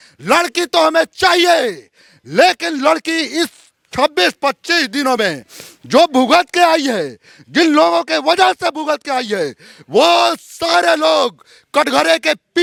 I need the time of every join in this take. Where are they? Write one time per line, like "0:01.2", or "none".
none